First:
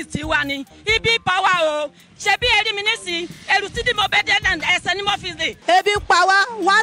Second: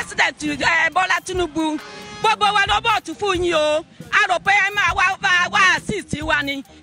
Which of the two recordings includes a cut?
first; 1 cut; at 5.6 s

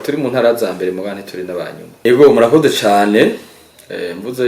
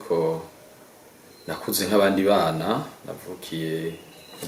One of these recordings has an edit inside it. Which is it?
first; 1 cut; at 2.1 s

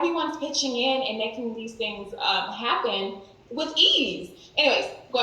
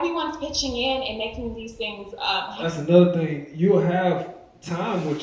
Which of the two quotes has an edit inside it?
first; 1 cut; at 2.5 s

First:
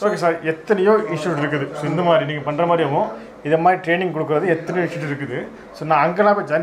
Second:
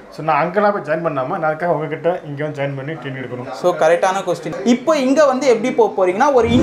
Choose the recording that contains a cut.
second; 1 cut; at 4.5 s

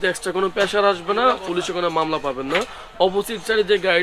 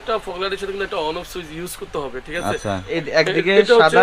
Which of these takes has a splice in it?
second; 1 cut; at 2.9 s

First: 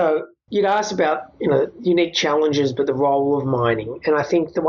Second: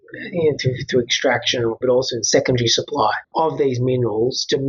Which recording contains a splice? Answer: second; 1 cut; at 1.8 s

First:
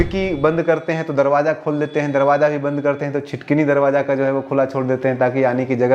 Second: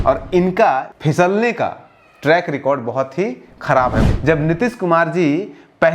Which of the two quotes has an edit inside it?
second; 2 cuts; at 0.9 s, 4.0 s

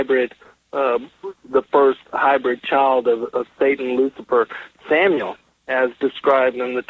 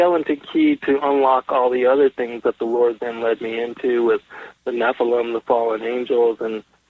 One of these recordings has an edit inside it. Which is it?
first; 1 cut; at 4.2 s

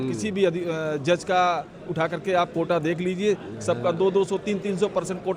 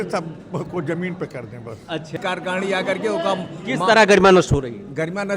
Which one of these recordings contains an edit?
second; 1 cut; at 2.2 s

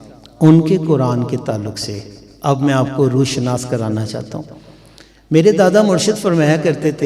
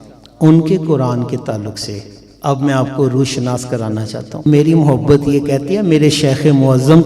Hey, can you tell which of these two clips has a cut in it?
second; 1 cut; at 4.4 s

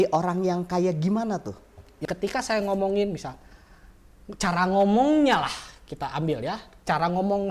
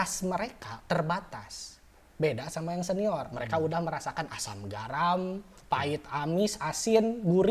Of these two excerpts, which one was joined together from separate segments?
first; 1 cut; at 2.0 s

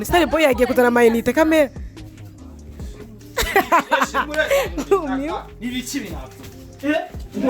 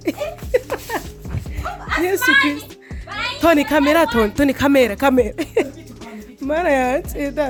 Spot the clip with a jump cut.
first; 2 cuts; at 1.7 s, 3.3 s

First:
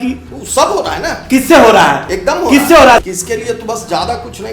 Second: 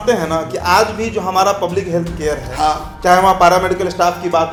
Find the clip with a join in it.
first; 1 cut; at 3.0 s

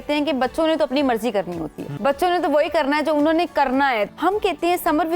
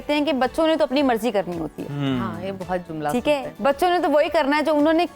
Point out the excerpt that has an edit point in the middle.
first; 2 cuts; at 1.9 s, 4.1 s

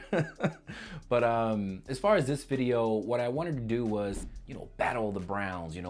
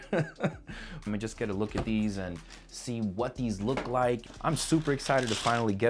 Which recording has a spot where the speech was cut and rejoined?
second; 2 cuts; at 1.0 s, 4.2 s

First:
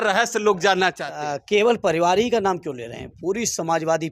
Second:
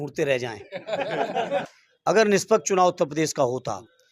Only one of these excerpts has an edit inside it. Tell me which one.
second; 1 cut; at 1.8 s

